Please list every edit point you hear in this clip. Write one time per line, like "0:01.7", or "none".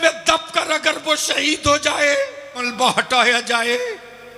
0:02.6